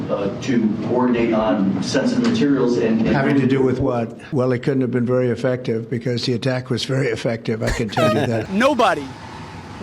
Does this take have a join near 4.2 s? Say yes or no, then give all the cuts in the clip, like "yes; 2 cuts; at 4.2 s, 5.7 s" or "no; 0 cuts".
yes; 2 cuts; at 4.2 s, 8.4 s